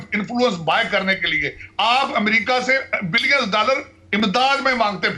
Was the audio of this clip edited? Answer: no; 0 cuts

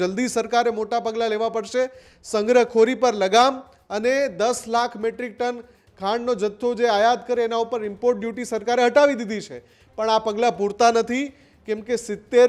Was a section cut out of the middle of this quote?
no; 0 cuts

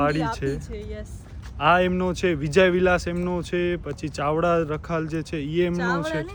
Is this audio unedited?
yes; 0 cuts

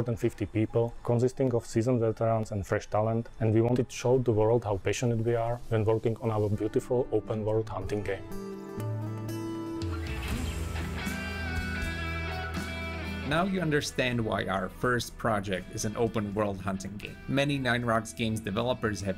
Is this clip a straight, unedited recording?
no; 2 cuts; at 1.1 s, 10.6 s

